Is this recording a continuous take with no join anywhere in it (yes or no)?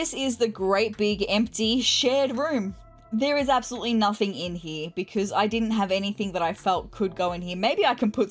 yes